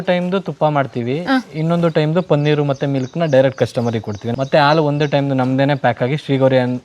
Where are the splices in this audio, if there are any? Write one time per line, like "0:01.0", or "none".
0:04.3